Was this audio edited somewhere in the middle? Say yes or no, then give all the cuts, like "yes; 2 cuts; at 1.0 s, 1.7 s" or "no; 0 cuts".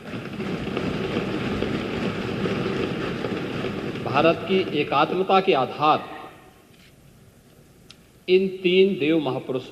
no; 0 cuts